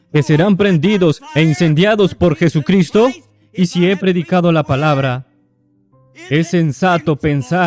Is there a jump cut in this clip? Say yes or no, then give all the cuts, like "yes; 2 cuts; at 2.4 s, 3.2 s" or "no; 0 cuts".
no; 0 cuts